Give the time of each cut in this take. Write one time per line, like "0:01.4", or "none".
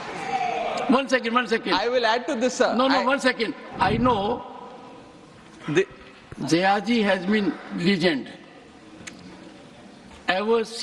0:03.6